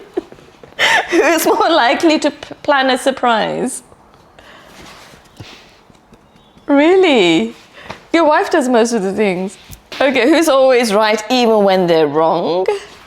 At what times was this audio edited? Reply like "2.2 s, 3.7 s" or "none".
none